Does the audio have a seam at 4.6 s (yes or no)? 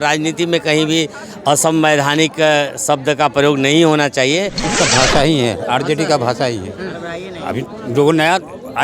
yes